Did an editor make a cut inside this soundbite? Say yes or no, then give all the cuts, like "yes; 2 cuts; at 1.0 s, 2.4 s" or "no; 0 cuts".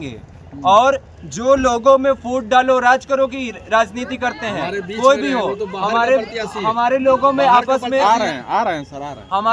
no; 0 cuts